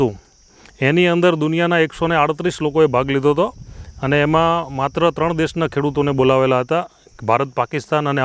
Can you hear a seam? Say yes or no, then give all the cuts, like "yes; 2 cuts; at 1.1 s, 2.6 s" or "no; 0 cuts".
no; 0 cuts